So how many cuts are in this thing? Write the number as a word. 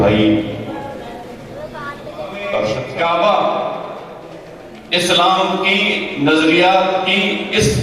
one